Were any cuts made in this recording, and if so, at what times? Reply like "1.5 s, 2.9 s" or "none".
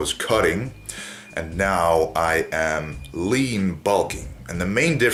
none